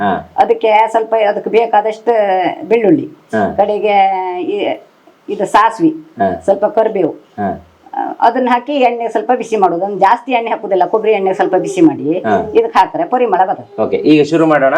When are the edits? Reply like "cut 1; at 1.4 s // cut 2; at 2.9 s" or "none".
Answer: none